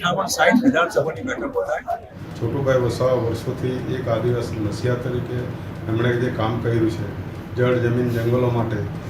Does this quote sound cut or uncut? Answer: cut